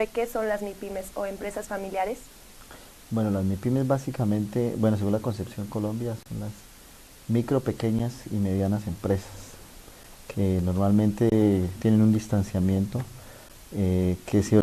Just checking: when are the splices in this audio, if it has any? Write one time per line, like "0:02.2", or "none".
0:01.2

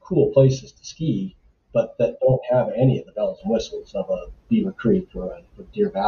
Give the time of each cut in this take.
none

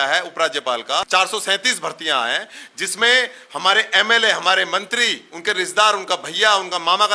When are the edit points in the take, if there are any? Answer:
0:01.1

